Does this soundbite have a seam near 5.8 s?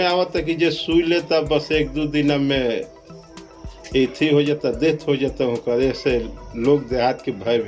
no; 0 cuts

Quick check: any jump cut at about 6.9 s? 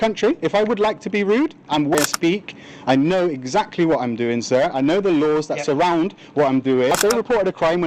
yes; 2 cuts; at 2.0 s, 6.9 s

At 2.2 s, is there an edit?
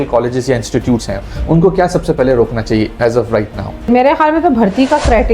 no; 1 cut; at 3.9 s

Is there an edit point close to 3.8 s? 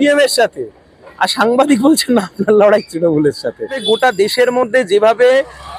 yes; 1 cut; at 3.8 s

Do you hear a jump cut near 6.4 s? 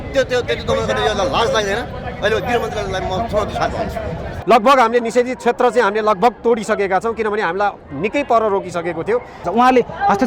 no; 2 cuts; at 4.3 s, 9.5 s

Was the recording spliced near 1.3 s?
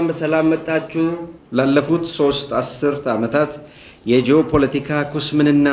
yes; 1 cut; at 1.3 s

